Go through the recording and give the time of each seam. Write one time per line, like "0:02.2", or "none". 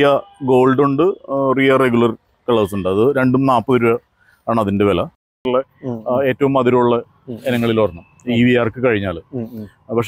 0:05.4